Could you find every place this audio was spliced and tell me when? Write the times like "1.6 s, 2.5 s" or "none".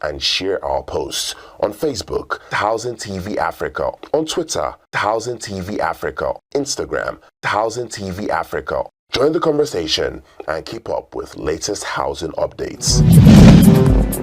12.8 s